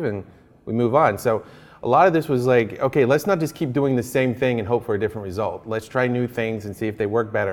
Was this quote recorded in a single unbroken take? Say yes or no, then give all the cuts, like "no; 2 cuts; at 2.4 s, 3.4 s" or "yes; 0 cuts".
yes; 0 cuts